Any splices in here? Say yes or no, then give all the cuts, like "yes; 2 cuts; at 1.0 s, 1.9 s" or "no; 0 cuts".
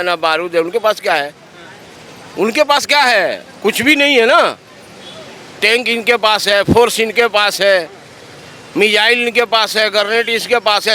no; 0 cuts